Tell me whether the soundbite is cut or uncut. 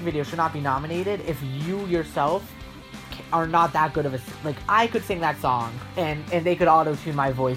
cut